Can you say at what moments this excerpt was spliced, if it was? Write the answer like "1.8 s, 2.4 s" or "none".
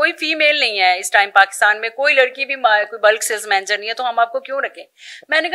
none